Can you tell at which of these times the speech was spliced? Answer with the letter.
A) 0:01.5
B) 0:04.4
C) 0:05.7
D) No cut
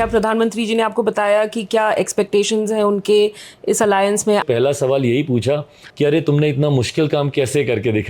B